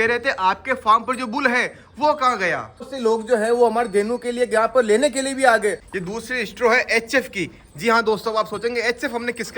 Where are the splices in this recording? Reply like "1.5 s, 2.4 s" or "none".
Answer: 2.8 s, 5.9 s